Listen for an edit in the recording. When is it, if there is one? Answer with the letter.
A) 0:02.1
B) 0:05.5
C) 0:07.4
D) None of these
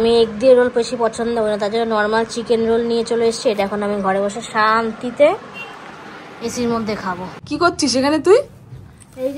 C